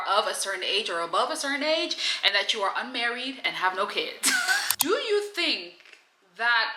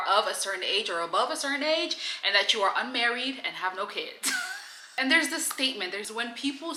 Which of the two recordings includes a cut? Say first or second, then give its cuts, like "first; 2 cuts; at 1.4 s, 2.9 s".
first; 1 cut; at 4.7 s